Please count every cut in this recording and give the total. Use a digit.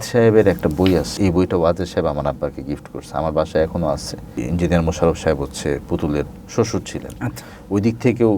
2